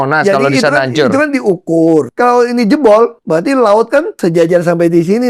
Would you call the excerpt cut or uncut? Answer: cut